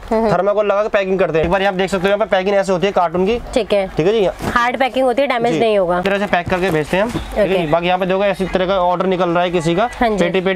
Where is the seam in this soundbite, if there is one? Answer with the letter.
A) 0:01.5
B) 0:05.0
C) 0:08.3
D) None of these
A